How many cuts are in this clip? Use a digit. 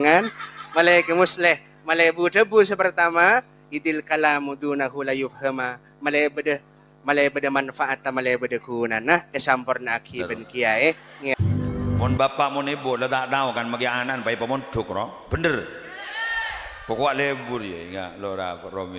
1